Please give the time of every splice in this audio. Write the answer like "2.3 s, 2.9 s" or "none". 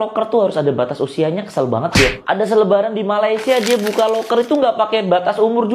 none